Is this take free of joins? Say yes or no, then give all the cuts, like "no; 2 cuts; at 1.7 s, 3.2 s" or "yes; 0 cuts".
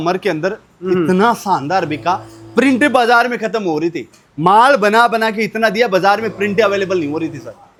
yes; 0 cuts